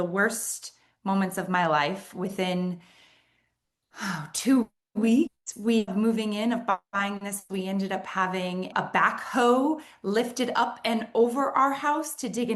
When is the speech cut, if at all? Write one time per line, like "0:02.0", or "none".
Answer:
0:08.7